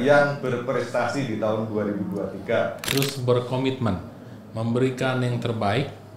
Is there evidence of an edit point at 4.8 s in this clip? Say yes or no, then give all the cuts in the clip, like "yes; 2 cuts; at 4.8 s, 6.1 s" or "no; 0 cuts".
no; 1 cut; at 2.8 s